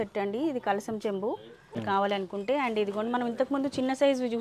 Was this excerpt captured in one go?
no; 1 cut; at 1.8 s

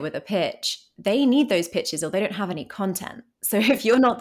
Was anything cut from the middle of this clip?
no; 0 cuts

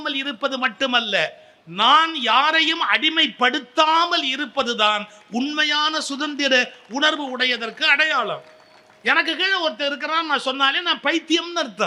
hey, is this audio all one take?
yes; 0 cuts

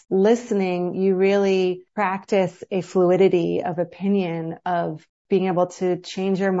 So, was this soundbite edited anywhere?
no; 0 cuts

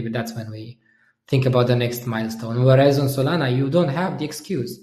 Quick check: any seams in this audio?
no; 0 cuts

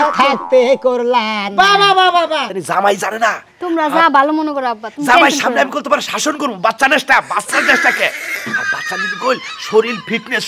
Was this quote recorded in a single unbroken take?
no; 1 cut; at 2.2 s

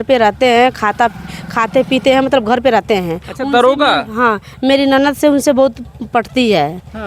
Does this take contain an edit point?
no; 0 cuts

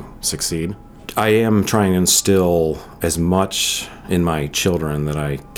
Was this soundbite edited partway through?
yes; 2 cuts; at 1.0 s, 2.9 s

